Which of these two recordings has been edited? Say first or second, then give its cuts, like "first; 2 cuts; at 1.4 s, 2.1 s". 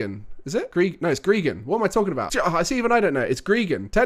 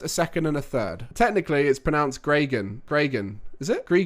second; 1 cut; at 1.0 s